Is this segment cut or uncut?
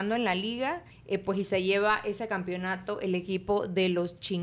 cut